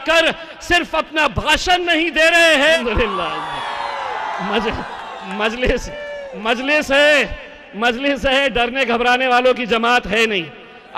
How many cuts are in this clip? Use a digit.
1